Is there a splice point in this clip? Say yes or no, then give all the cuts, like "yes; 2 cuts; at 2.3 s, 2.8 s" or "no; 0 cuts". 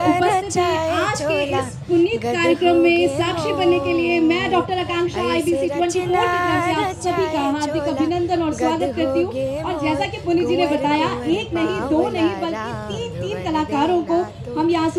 no; 0 cuts